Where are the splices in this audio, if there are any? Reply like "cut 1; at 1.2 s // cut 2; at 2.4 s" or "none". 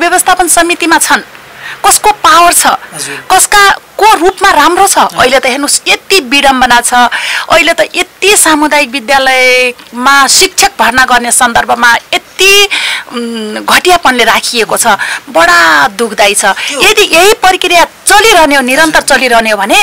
none